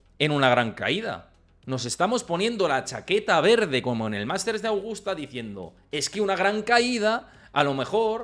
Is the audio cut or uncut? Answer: uncut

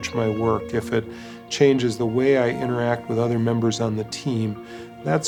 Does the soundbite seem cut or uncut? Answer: uncut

